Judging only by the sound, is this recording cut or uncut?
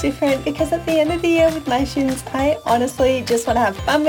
uncut